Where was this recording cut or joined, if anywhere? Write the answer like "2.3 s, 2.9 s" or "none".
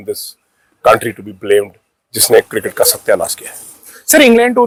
none